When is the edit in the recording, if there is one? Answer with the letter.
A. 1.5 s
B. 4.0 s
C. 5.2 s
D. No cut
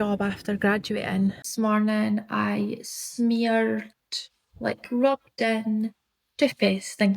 A